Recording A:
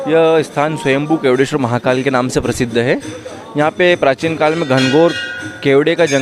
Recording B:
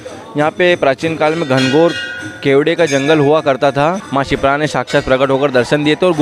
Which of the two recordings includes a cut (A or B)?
B